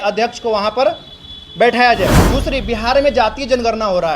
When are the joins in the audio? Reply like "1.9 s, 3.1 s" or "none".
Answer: 2.3 s